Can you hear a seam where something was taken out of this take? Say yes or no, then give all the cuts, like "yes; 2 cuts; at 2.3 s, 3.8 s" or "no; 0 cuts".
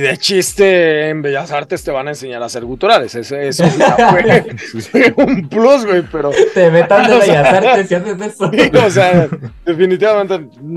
no; 0 cuts